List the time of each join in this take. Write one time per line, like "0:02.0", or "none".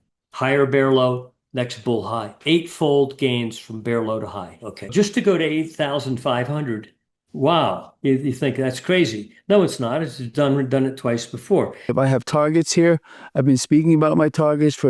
0:04.9
0:11.9